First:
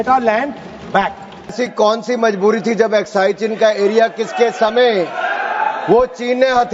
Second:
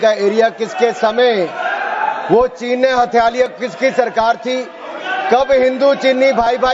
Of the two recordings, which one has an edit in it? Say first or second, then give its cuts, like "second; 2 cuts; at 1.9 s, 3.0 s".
first; 1 cut; at 1.5 s